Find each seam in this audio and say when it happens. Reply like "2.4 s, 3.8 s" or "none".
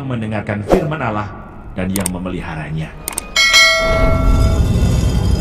none